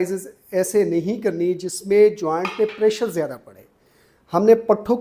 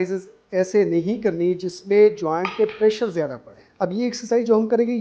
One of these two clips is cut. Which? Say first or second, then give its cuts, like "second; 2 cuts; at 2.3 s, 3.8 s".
second; 1 cut; at 3.6 s